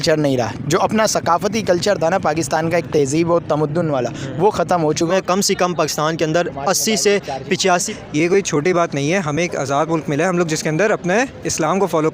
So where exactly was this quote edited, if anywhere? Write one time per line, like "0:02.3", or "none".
0:05.1
0:07.9